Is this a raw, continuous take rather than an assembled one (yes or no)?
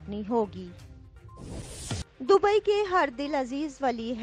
no